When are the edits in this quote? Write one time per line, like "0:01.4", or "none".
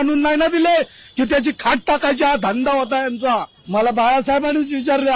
0:03.6